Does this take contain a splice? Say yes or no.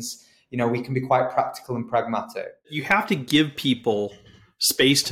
yes